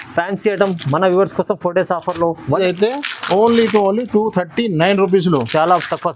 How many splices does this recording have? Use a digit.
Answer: 1